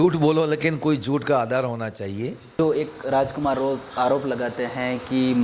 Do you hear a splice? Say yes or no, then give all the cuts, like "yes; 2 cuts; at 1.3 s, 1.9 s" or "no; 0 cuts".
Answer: yes; 1 cut; at 2.5 s